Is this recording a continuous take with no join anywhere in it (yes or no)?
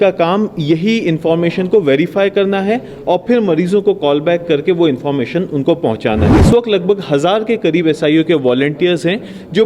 no